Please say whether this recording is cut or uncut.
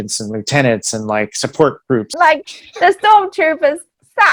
cut